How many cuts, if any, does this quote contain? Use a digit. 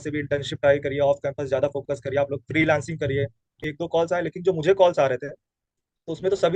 1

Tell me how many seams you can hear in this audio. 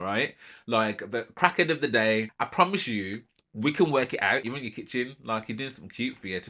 2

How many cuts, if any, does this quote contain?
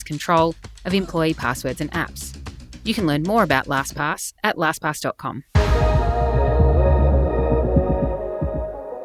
1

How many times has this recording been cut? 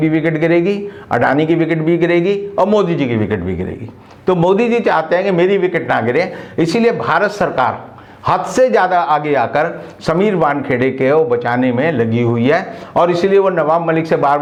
0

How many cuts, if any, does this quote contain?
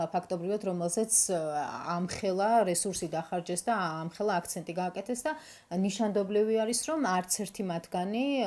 0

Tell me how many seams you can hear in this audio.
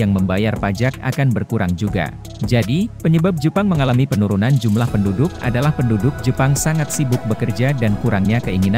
1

